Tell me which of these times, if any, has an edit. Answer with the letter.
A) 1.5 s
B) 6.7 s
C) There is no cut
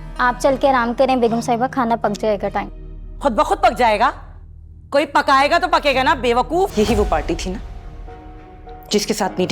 B